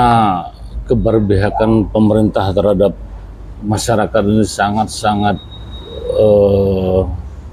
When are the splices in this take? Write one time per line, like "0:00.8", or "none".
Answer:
none

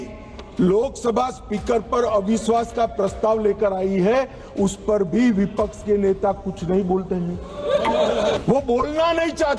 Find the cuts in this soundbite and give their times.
0:08.4

